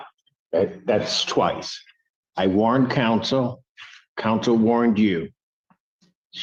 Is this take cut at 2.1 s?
no; 0 cuts

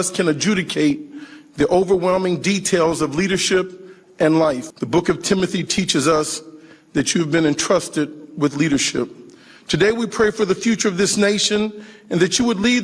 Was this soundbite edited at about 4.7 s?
yes; 1 cut; at 4.7 s

